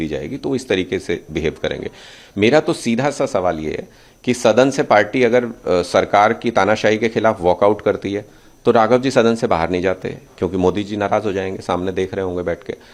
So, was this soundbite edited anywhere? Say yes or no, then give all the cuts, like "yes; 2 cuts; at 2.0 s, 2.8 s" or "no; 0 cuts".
no; 0 cuts